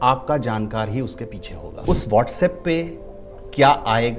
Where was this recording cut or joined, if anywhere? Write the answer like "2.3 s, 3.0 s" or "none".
1.8 s

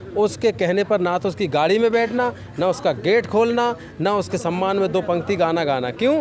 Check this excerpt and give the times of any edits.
none

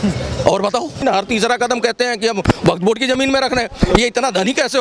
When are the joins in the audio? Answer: 1.0 s

